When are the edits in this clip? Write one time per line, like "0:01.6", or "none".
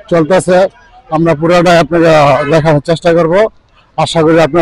none